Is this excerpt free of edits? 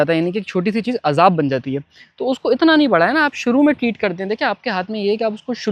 yes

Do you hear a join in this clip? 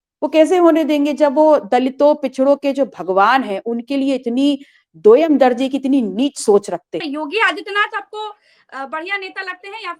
yes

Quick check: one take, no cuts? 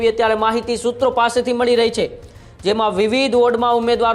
yes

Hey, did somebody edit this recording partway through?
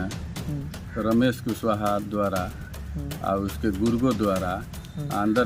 no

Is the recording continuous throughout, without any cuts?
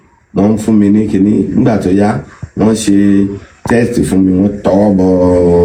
yes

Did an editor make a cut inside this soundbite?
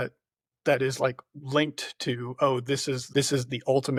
no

